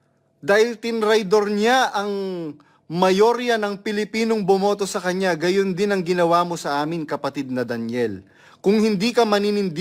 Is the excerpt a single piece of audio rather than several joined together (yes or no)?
yes